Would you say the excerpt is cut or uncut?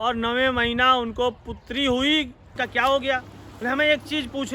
cut